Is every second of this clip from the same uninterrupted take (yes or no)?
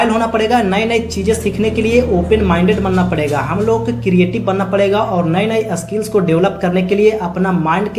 yes